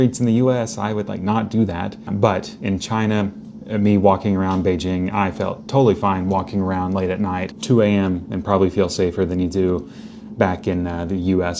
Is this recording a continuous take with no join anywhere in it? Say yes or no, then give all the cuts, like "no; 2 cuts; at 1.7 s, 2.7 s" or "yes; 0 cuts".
no; 2 cuts; at 2.0 s, 7.5 s